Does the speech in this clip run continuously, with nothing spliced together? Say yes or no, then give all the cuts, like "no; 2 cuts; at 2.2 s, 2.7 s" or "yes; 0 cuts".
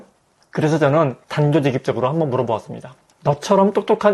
no; 1 cut; at 1.2 s